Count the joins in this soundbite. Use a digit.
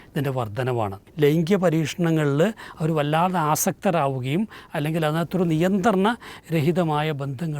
1